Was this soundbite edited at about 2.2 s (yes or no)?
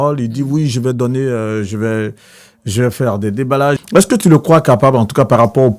no